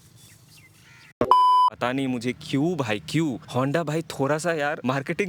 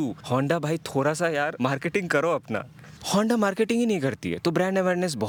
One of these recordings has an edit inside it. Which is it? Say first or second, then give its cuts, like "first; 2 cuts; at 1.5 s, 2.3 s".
first; 1 cut; at 1.7 s